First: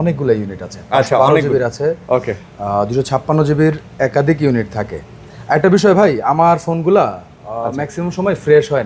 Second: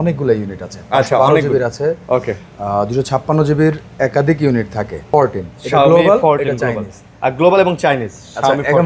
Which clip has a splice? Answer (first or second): second